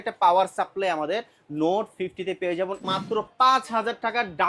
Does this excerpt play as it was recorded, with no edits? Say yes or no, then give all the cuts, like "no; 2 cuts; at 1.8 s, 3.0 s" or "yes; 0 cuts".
no; 1 cut; at 2.8 s